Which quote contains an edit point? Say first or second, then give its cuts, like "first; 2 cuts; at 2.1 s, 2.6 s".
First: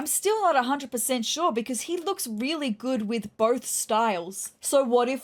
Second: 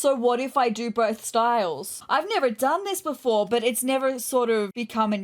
second; 1 cut; at 1.9 s